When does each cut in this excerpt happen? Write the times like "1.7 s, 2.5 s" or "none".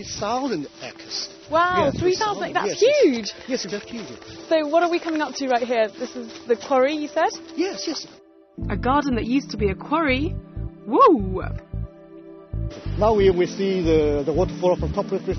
14.1 s